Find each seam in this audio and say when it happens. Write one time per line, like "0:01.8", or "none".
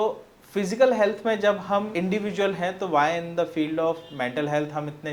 0:01.9